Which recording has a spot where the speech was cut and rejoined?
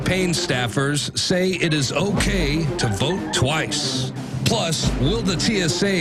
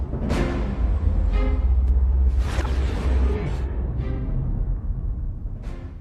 second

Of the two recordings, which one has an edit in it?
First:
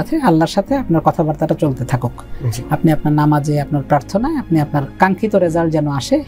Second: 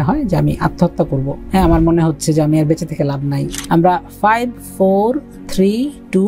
second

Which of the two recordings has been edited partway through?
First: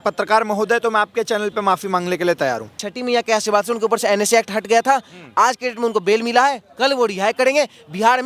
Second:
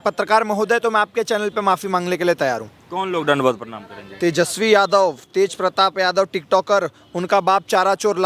first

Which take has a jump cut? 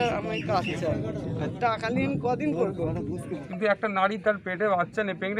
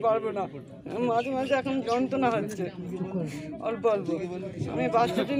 first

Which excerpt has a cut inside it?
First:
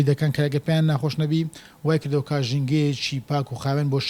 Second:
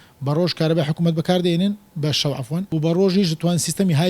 second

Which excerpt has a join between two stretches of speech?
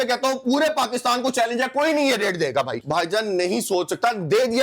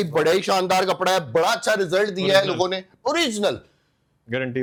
first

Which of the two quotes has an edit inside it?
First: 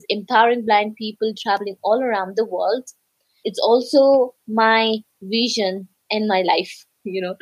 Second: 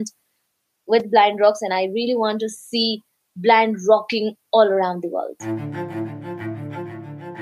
second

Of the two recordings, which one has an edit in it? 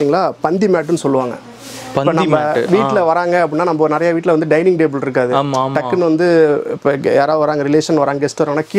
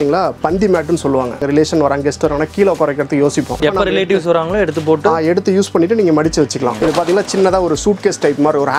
second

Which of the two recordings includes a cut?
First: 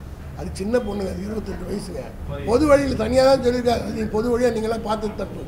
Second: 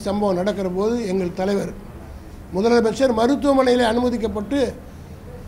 first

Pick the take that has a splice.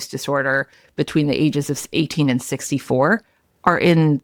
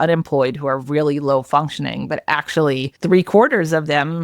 second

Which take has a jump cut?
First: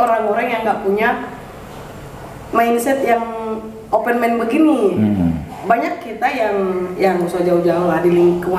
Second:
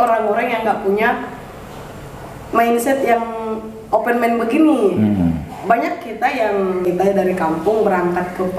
second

